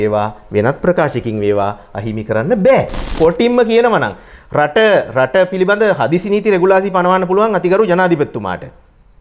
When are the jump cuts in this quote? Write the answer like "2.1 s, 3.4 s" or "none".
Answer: 3.1 s

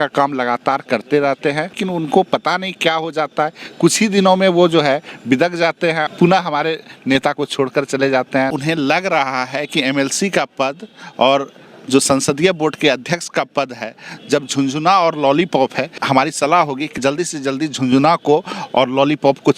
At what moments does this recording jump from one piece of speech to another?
1.8 s, 6.1 s, 8.5 s, 16.0 s, 16.9 s

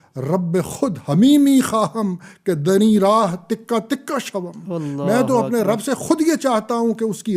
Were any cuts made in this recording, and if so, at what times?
none

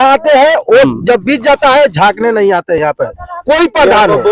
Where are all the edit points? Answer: none

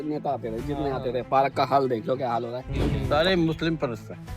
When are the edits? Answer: 2.9 s

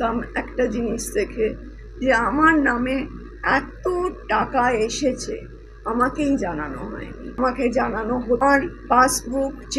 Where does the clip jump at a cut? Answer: 7.3 s, 8.4 s

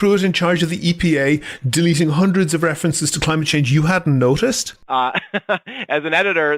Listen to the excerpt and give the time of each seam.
4.7 s

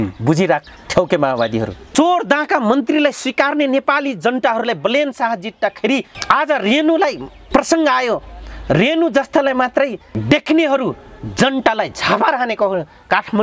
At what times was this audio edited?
1.8 s, 6.1 s, 7.3 s, 10.1 s

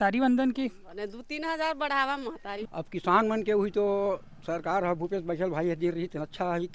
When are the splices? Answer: 2.5 s

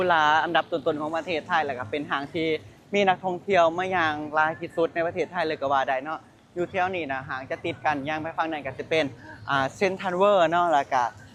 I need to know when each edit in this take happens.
none

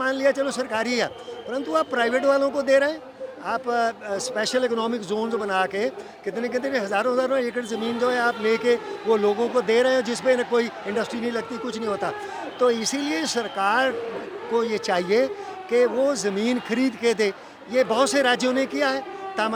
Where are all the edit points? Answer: none

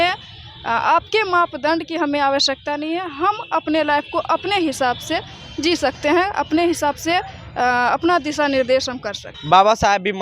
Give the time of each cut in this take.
9.3 s

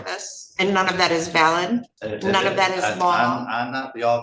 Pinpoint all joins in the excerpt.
2.0 s

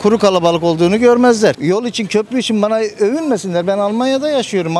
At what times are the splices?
1.6 s

